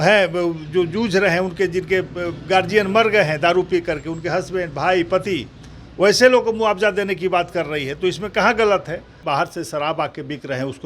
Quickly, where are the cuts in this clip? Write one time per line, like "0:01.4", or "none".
0:09.2

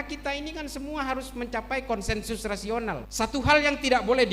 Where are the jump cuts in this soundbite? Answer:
0:03.1

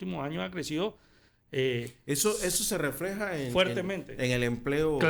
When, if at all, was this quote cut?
none

